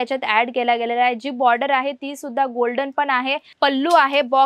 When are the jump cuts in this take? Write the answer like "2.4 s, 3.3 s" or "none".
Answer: 3.4 s